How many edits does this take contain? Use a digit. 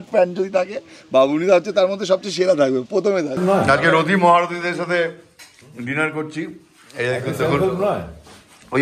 1